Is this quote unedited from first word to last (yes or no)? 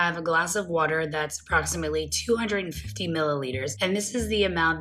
yes